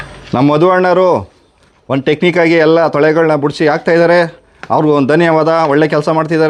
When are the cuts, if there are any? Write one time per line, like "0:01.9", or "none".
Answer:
none